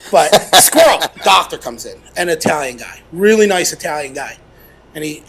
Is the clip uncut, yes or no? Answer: no